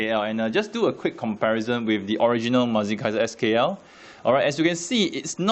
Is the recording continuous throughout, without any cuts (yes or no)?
no